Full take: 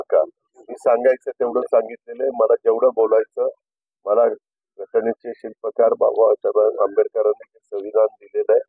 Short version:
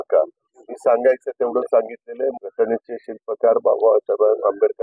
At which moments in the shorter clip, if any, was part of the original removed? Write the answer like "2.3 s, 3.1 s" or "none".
2.3 s